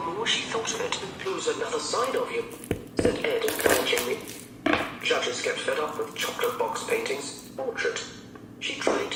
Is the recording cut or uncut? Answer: uncut